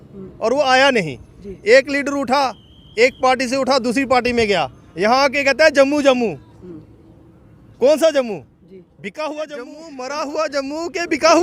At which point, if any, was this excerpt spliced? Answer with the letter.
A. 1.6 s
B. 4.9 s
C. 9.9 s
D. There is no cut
C